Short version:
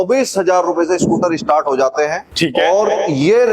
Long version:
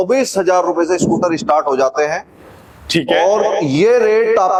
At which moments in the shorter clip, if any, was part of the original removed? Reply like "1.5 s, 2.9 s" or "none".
2.2 s